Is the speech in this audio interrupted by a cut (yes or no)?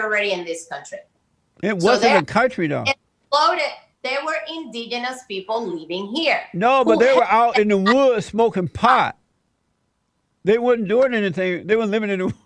no